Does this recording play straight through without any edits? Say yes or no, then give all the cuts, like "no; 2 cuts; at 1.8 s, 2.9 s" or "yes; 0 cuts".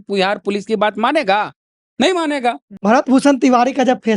no; 1 cut; at 2.8 s